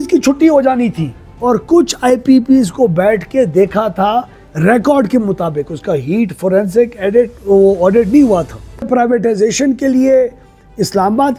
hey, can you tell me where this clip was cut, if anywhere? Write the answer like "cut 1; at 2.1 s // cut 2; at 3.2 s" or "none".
cut 1; at 1.2 s // cut 2; at 8.9 s